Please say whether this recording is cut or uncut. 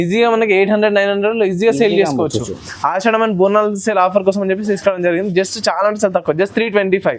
uncut